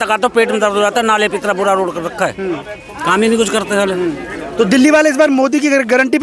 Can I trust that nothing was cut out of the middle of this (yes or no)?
yes